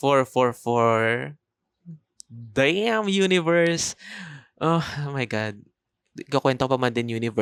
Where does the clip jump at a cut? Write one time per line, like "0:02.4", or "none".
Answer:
none